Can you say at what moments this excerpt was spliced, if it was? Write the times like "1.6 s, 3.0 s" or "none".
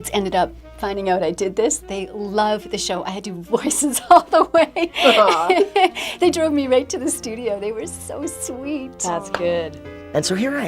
9.2 s

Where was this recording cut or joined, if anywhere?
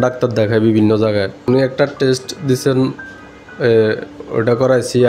1.4 s

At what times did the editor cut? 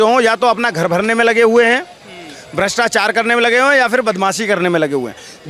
none

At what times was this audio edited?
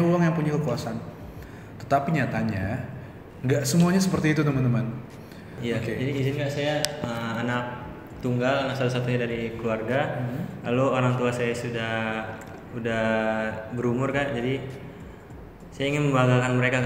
5.5 s

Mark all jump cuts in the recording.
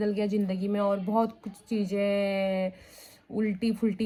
none

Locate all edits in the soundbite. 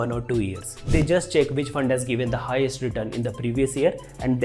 1.0 s

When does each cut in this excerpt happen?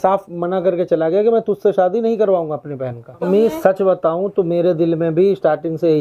3.2 s

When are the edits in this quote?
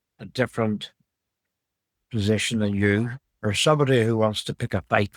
none

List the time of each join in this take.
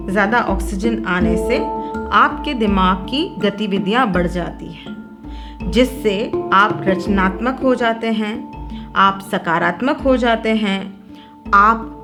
none

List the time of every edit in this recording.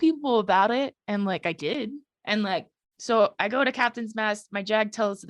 2.1 s, 2.8 s

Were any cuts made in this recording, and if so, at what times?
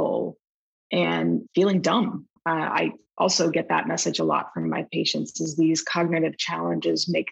2.7 s

